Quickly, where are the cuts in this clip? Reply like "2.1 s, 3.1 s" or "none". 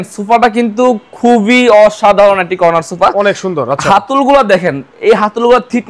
none